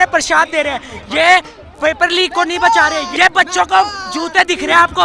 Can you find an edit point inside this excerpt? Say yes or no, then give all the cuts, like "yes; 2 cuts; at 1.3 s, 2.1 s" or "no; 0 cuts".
yes; 1 cut; at 3.1 s